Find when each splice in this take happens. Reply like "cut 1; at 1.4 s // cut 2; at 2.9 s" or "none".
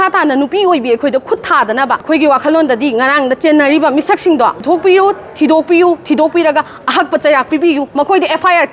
none